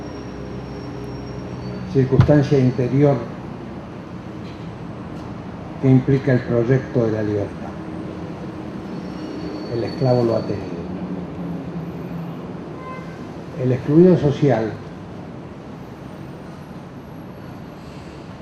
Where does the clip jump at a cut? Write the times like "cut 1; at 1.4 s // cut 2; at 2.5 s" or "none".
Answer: cut 1; at 3.6 s